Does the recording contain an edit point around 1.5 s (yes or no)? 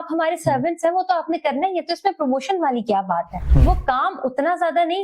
no